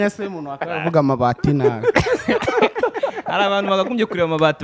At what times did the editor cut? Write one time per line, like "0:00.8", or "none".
none